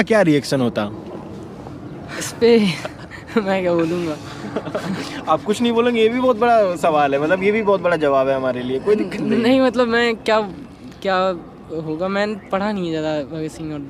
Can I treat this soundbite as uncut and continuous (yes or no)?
yes